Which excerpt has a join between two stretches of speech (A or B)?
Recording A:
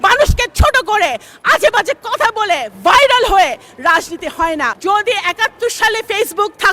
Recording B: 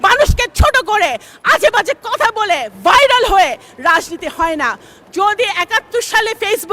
A